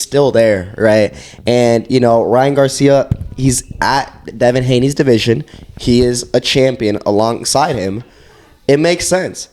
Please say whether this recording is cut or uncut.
uncut